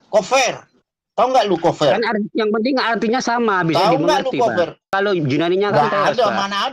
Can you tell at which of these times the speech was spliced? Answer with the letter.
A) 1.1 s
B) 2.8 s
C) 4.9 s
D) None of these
C